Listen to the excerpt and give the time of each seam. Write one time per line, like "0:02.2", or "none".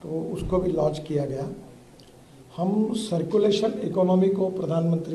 none